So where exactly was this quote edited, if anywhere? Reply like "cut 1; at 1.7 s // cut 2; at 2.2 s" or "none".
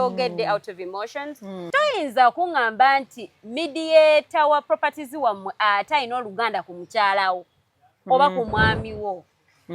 cut 1; at 1.7 s